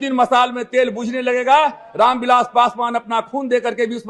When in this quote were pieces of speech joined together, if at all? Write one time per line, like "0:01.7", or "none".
none

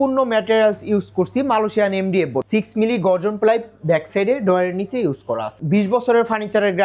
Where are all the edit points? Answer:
0:02.5
0:05.5

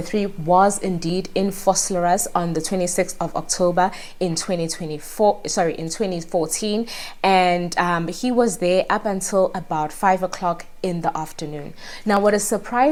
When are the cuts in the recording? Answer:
none

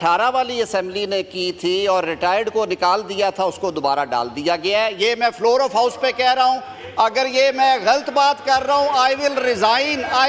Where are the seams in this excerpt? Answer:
none

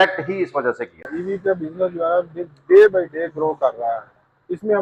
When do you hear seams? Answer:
0:01.1

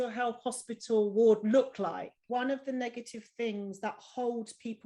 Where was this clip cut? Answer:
0:02.2

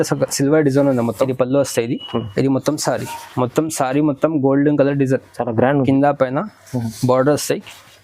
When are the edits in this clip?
0:01.3

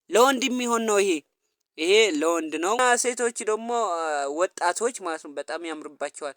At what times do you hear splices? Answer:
0:02.8

